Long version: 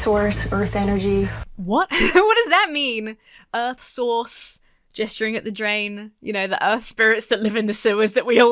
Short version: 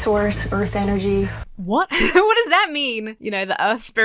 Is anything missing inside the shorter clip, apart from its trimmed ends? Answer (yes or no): yes